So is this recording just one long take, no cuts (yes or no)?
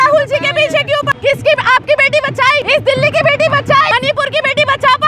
no